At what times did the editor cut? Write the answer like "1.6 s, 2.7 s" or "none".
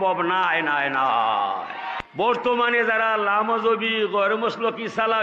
2.0 s